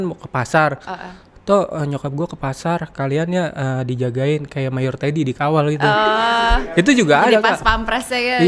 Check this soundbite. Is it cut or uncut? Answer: uncut